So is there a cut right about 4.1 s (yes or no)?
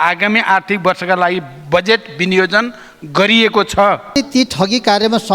yes